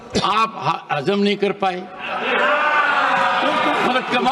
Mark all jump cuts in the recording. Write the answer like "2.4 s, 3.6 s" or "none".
none